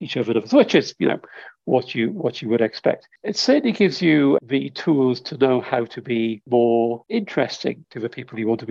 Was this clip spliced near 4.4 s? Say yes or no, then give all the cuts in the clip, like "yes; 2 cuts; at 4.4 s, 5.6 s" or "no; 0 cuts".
yes; 5 cuts; at 3.1 s, 4.4 s, 6.4 s, 7.0 s, 7.9 s